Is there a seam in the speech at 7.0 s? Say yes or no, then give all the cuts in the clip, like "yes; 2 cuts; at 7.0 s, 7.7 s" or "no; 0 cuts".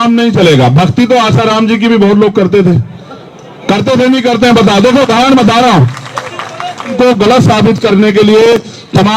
yes; 1 cut; at 7.0 s